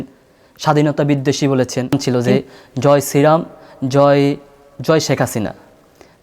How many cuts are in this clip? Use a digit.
1